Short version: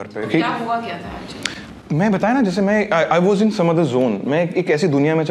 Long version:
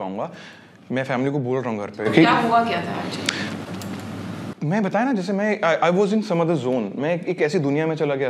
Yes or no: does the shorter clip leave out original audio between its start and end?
yes